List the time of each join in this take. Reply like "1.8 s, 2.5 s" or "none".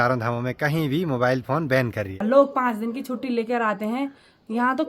2.1 s